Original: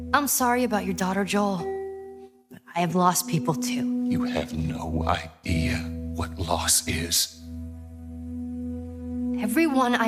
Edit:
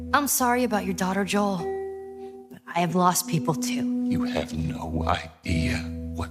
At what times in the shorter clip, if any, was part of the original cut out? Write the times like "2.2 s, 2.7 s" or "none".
none